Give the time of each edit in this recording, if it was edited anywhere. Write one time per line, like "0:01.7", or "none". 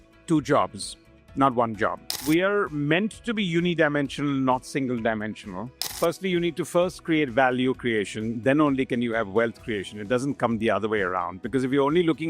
0:02.1
0:06.0